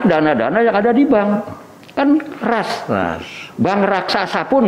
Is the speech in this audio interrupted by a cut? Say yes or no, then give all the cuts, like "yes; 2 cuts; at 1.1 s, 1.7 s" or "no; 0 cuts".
no; 0 cuts